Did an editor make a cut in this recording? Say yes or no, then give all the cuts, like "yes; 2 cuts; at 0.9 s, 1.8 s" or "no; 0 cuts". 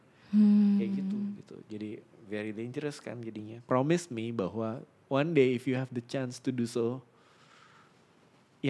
yes; 1 cut; at 3.6 s